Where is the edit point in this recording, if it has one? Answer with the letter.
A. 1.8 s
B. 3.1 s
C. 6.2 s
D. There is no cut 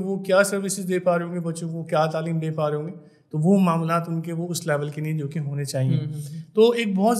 D